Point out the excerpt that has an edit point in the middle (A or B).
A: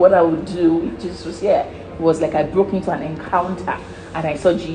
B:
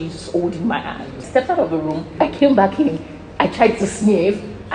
B